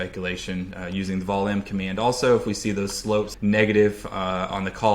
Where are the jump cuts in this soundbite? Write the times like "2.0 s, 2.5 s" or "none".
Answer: 3.3 s

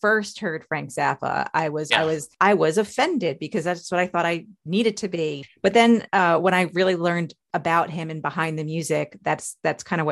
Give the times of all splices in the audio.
1.9 s, 5.4 s

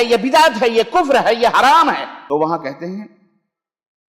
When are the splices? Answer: 2.1 s

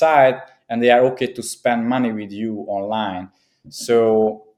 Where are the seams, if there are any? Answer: none

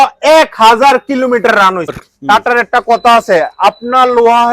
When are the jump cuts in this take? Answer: 2.1 s

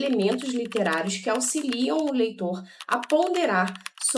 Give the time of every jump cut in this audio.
none

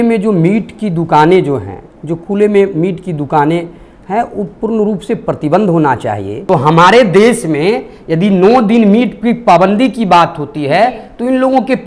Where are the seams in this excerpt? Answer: 6.3 s

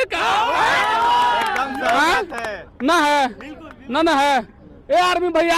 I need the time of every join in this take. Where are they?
none

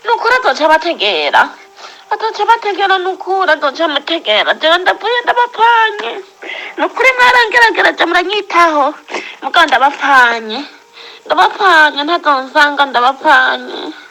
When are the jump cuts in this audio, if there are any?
none

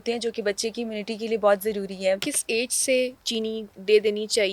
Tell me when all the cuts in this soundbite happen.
2.3 s, 3.2 s

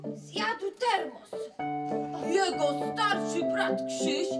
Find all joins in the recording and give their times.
none

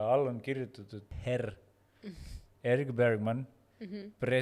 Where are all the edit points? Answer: 1.0 s

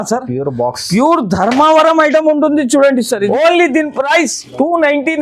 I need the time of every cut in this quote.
3.3 s

